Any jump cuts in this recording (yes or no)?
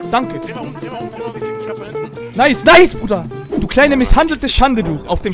yes